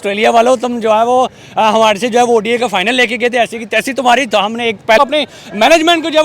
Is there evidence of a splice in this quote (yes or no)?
yes